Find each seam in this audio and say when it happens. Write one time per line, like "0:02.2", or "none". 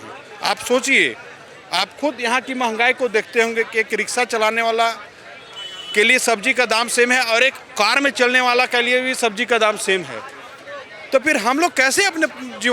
none